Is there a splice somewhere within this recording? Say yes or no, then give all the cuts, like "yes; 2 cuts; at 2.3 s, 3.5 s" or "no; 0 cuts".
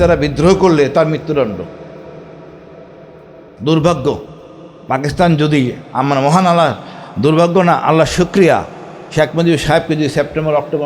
no; 0 cuts